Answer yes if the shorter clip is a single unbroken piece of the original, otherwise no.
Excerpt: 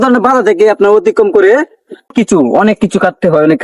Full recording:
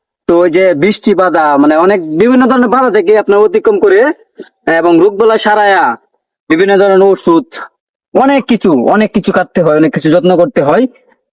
no